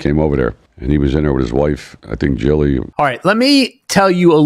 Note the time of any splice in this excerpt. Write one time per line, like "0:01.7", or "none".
0:02.9